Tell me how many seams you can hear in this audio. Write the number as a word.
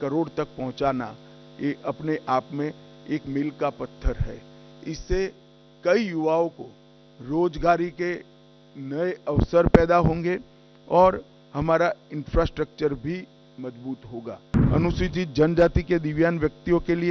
one